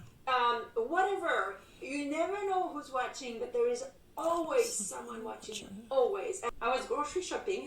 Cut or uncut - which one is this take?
cut